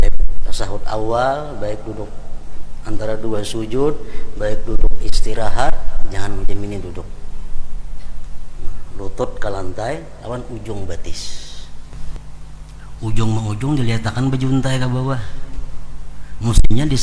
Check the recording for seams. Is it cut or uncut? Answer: cut